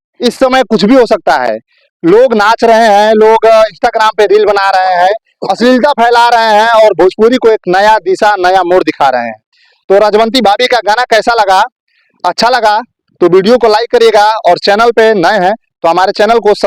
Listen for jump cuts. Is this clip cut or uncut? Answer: uncut